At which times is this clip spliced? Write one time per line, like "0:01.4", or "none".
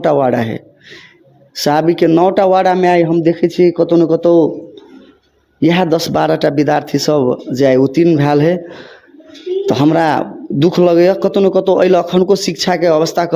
none